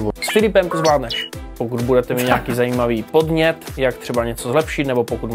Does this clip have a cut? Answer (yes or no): yes